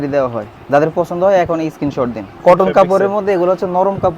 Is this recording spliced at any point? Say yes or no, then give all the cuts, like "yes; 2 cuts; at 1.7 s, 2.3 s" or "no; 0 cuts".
yes; 1 cut; at 2.3 s